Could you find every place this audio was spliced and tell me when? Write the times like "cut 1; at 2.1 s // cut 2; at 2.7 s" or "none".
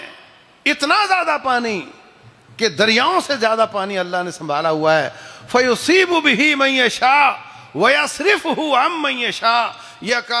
none